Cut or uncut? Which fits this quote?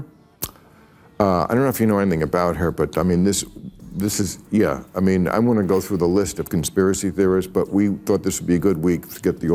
uncut